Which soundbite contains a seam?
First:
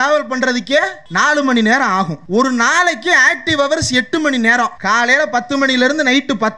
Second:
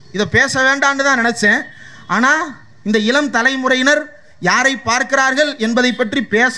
first; 3 cuts; at 1.0 s, 2.2 s, 4.8 s

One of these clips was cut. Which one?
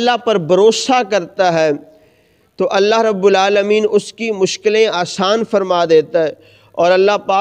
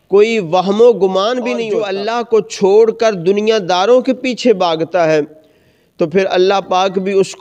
second; 1 cut; at 1.8 s

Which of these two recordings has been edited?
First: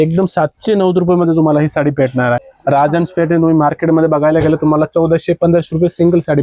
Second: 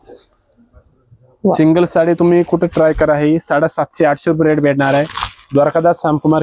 first; 1 cut; at 2.4 s

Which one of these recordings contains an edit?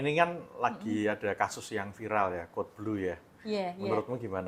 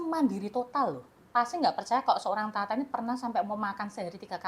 second; 1 cut; at 1.1 s

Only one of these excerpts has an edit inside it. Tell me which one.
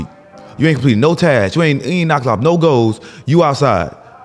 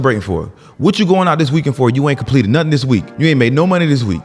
second; 1 cut; at 3.1 s

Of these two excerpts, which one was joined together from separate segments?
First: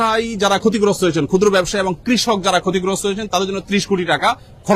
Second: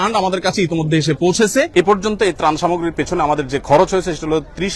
second; 1 cut; at 1.7 s

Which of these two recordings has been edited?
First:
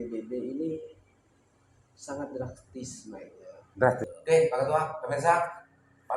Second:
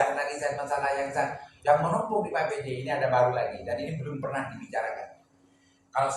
first; 1 cut; at 4.0 s

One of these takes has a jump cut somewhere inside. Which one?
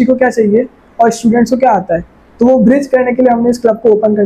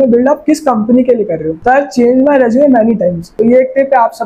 second; 2 cuts; at 1.5 s, 3.3 s

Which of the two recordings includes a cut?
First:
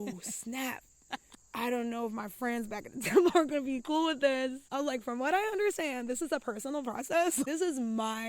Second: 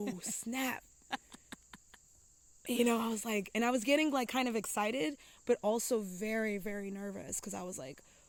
first; 3 cuts; at 1.4 s, 4.6 s, 7.5 s

